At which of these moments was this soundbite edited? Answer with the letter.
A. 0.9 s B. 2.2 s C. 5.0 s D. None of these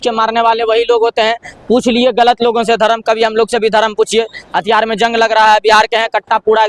D